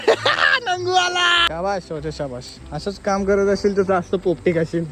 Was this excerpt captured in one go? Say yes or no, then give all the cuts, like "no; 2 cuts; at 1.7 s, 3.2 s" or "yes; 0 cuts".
no; 1 cut; at 1.5 s